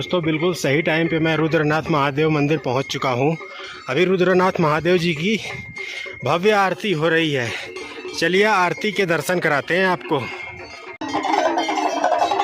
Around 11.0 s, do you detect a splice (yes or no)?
yes